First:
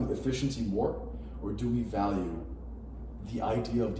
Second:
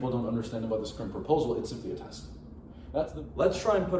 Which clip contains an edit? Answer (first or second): second